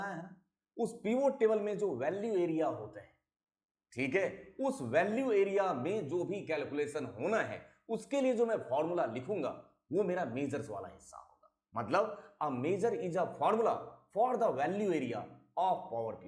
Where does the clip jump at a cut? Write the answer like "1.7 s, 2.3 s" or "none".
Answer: 11.9 s